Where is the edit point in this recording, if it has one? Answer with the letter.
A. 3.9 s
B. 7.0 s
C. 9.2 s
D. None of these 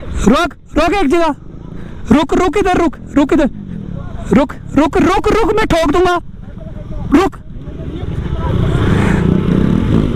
D